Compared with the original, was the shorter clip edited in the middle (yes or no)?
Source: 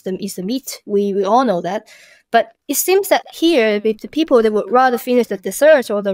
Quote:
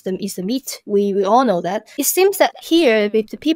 yes